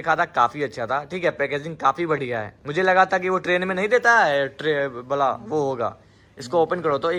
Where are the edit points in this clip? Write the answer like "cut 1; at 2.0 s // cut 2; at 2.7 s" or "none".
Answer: none